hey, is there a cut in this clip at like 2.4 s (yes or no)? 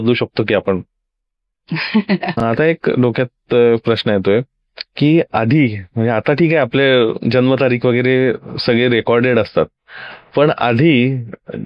yes